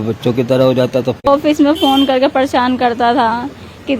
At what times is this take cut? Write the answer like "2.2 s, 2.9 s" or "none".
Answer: 1.2 s